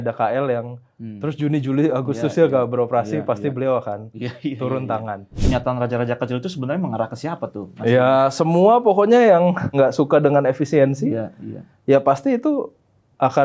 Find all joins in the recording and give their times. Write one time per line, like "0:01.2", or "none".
0:05.3